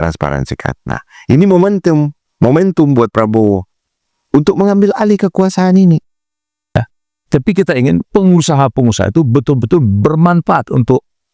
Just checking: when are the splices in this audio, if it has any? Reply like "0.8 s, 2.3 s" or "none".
6.8 s